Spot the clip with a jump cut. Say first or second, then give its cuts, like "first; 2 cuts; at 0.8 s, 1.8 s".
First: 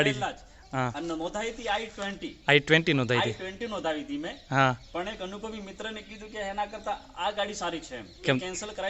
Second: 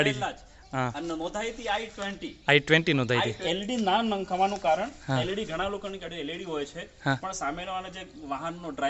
second; 1 cut; at 3.4 s